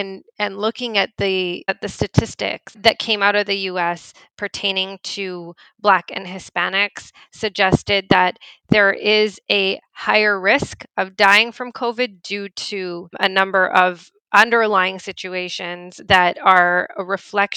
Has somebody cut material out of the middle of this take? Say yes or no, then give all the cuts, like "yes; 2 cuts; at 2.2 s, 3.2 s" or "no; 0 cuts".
yes; 2 cuts; at 2.8 s, 13.1 s